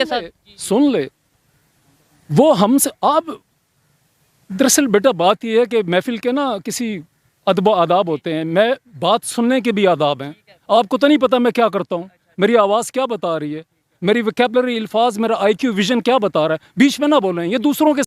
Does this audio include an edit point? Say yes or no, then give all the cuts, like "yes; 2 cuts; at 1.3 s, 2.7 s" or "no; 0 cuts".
no; 0 cuts